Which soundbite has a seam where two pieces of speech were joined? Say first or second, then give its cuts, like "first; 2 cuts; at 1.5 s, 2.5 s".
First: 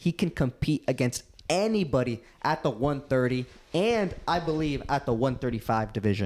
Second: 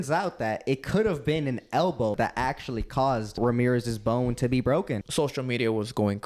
second; 3 cuts; at 2.2 s, 3.4 s, 5.0 s